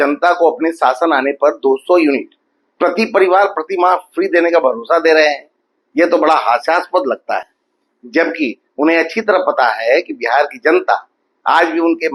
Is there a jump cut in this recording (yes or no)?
no